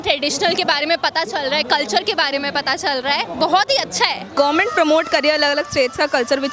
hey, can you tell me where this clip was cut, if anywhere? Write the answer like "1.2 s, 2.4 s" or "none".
3.3 s, 4.3 s